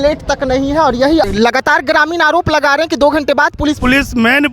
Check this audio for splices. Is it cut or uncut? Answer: cut